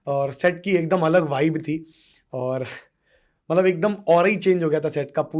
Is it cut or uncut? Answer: uncut